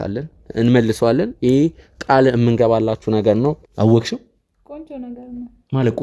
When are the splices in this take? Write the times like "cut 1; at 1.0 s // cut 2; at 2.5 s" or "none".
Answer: cut 1; at 3.7 s